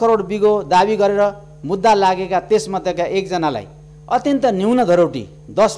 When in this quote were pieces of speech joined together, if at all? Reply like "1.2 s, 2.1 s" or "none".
none